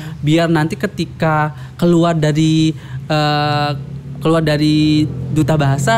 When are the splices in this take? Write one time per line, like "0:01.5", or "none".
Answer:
none